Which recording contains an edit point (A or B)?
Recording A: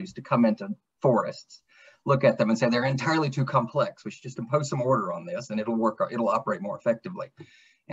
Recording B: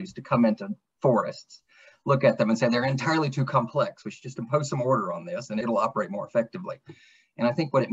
B